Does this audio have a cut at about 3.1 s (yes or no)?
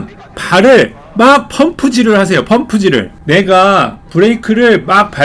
yes